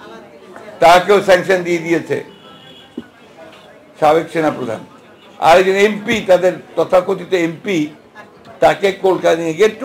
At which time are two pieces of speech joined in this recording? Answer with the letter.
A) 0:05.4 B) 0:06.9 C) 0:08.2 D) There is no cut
D